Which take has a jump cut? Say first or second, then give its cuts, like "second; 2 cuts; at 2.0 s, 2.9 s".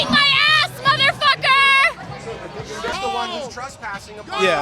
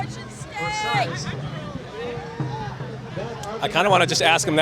first; 1 cut; at 2.9 s